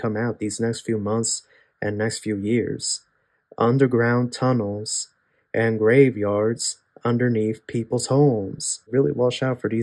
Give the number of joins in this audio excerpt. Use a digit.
1